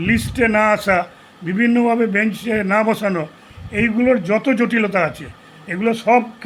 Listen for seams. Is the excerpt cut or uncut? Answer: uncut